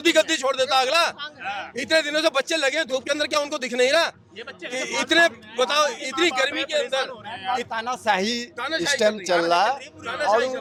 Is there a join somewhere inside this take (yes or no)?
no